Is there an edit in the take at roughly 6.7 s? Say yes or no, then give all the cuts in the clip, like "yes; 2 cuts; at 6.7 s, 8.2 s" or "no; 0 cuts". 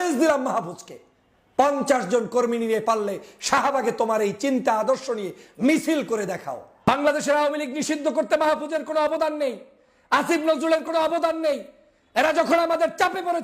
yes; 1 cut; at 6.7 s